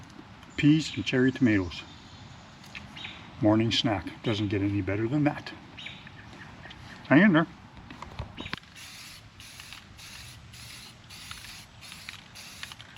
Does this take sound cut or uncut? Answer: cut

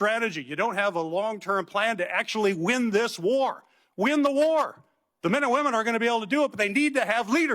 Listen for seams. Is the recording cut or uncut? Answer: uncut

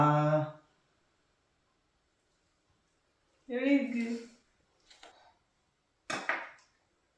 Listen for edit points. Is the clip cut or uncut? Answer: cut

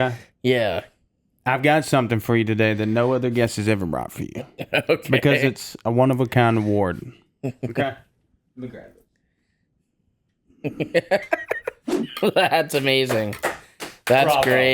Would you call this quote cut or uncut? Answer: cut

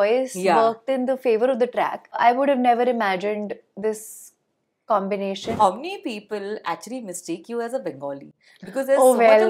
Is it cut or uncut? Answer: cut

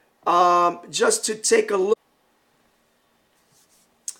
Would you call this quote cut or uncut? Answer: uncut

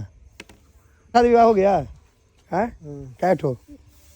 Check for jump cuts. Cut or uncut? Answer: cut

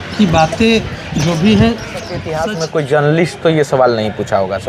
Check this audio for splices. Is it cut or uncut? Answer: cut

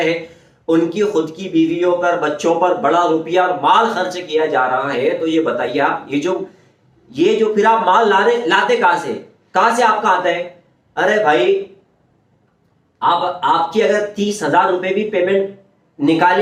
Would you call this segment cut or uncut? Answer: uncut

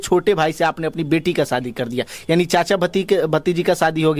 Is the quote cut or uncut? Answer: uncut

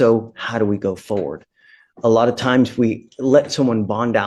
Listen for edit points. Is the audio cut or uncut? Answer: uncut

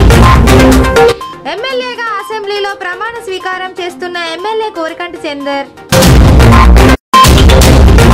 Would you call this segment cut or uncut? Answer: uncut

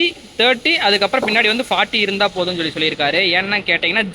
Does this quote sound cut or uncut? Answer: uncut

